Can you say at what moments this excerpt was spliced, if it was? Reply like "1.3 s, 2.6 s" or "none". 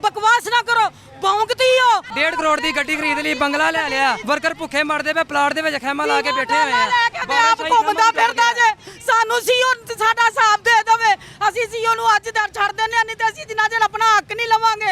2.1 s, 4.2 s